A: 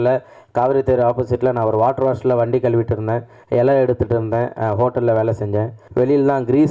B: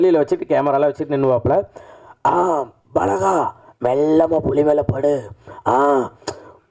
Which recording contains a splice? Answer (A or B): A